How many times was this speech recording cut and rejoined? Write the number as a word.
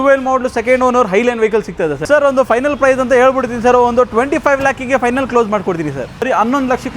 two